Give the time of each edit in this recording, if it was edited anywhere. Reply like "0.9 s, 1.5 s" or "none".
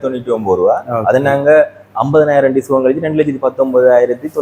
none